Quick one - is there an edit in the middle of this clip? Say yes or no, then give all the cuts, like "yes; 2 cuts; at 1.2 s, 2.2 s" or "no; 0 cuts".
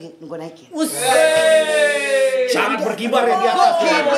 no; 0 cuts